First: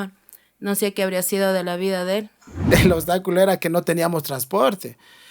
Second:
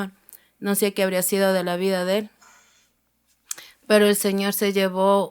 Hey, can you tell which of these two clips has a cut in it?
first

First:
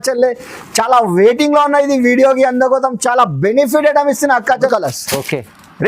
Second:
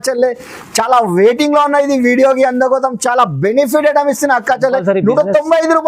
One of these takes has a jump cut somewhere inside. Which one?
first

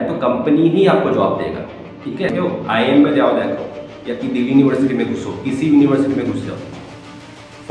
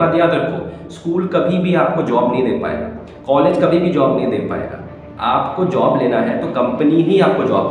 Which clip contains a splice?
first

